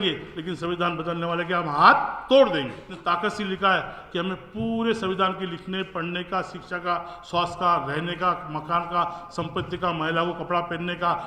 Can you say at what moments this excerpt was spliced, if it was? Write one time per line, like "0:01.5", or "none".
0:02.9